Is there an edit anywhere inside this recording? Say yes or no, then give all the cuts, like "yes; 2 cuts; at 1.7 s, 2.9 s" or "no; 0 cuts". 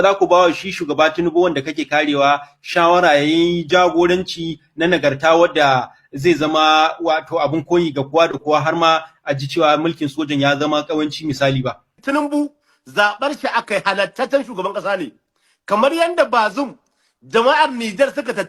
yes; 1 cut; at 11.9 s